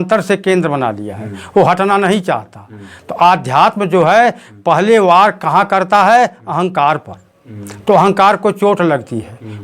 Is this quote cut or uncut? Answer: uncut